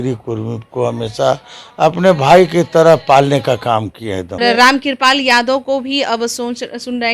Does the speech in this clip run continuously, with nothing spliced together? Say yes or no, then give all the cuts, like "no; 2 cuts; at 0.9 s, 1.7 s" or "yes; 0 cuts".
no; 1 cut; at 4.4 s